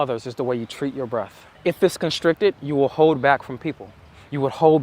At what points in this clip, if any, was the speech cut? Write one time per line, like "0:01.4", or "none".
0:01.4